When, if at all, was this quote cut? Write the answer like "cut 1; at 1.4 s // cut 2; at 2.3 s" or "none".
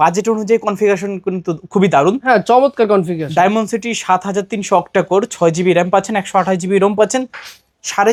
none